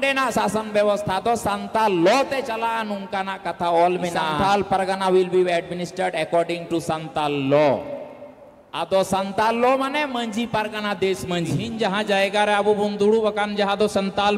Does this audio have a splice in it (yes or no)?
yes